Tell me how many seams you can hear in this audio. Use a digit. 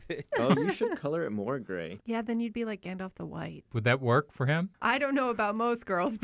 3